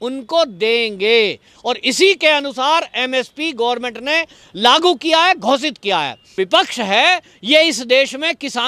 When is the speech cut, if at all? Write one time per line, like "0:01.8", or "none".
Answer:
0:06.4